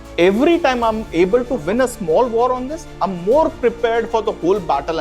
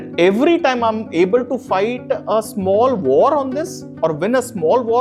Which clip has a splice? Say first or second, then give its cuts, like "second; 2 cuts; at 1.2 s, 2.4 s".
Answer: first; 1 cut; at 1.6 s